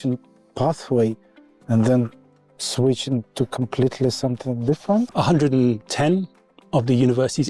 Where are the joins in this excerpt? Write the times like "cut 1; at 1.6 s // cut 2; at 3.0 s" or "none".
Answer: cut 1; at 5.1 s